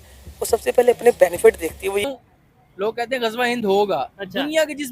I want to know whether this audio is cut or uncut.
cut